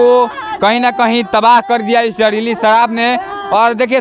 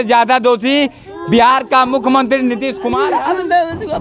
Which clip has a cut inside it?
second; 1 cut; at 2.8 s

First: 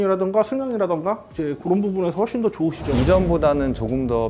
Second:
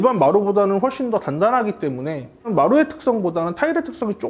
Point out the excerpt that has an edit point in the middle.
first; 1 cut; at 2.8 s

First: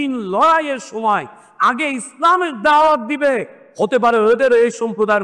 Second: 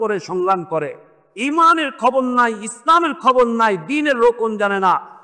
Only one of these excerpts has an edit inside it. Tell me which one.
first; 1 cut; at 3.6 s

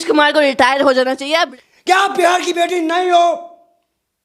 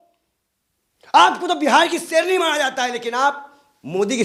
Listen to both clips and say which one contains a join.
first; 1 cut; at 1.5 s

